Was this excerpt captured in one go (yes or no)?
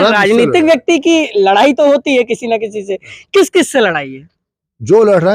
yes